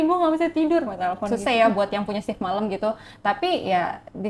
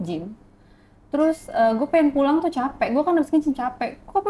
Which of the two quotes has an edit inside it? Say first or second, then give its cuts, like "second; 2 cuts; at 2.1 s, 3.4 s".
first; 1 cut; at 1.3 s